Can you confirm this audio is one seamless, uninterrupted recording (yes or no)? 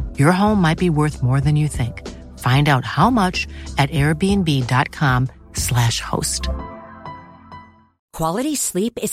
yes